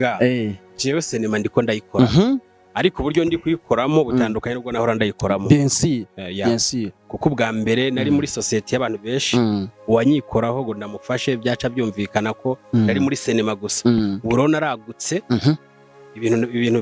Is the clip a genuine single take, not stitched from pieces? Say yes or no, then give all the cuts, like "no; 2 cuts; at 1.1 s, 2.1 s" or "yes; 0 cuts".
yes; 0 cuts